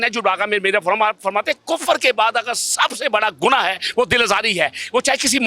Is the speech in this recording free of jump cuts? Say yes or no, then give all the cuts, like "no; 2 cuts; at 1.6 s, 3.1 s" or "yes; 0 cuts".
yes; 0 cuts